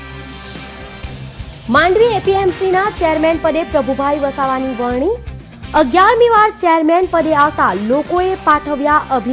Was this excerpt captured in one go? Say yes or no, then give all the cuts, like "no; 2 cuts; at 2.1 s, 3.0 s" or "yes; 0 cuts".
no; 1 cut; at 1.1 s